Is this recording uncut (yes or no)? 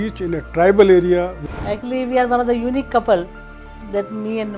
no